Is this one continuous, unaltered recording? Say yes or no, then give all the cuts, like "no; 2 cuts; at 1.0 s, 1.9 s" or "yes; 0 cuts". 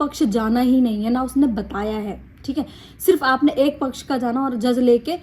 yes; 0 cuts